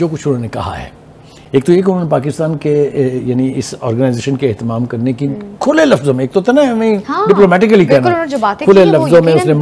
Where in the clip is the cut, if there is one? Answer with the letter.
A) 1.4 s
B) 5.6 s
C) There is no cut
C